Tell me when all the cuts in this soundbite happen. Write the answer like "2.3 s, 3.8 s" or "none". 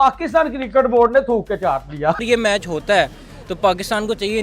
2.2 s